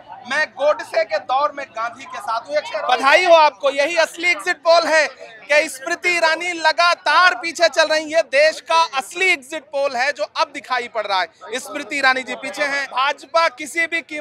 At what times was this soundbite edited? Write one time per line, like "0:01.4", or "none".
0:02.8
0:12.8